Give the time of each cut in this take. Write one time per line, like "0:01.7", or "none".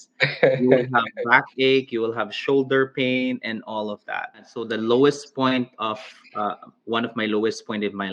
0:04.6